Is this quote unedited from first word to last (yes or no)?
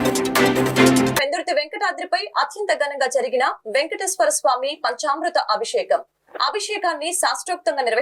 no